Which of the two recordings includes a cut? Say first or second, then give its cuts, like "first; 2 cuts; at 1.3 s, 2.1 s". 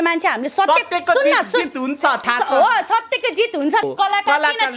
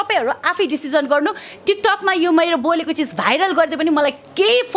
first; 1 cut; at 3.8 s